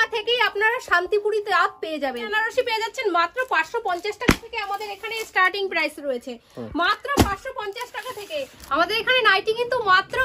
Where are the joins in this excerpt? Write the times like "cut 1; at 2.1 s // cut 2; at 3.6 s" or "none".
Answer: cut 1; at 2.3 s // cut 2; at 8.6 s